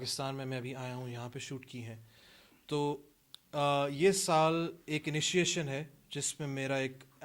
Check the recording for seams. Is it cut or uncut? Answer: uncut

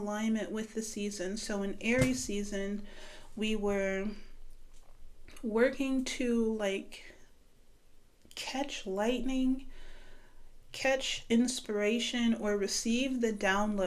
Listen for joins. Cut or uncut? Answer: uncut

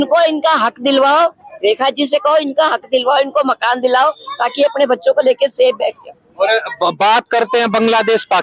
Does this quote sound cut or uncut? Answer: uncut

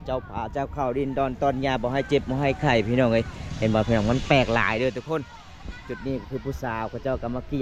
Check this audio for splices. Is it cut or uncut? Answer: uncut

